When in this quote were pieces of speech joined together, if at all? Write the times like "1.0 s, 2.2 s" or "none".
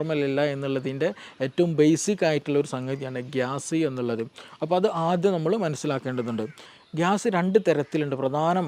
6.7 s